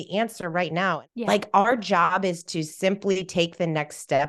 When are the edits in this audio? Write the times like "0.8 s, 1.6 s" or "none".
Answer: 1.0 s